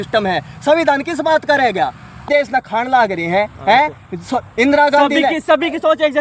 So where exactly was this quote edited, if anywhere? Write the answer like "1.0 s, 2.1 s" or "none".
2.3 s